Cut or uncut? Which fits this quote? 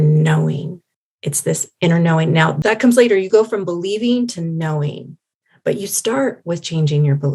cut